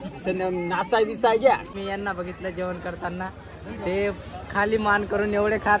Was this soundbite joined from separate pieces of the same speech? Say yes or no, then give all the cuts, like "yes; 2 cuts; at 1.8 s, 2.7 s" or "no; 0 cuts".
yes; 1 cut; at 1.8 s